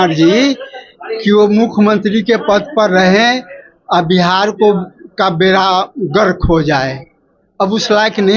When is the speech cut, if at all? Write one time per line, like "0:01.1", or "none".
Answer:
none